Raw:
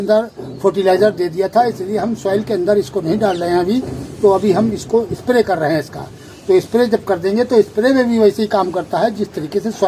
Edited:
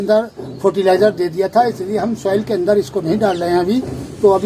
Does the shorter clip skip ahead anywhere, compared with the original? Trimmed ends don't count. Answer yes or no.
no